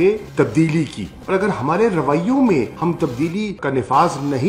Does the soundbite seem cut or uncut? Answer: uncut